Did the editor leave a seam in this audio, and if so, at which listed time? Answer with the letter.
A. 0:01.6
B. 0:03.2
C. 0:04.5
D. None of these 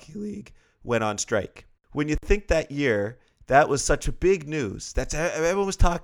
A